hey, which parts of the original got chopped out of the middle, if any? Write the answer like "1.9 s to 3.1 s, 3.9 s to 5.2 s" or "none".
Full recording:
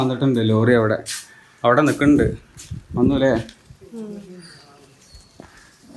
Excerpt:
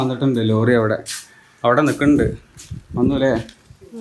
none